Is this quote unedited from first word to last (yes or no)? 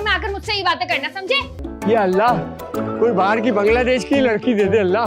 no